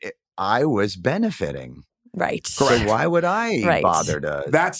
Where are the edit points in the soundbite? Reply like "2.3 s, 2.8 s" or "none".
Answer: none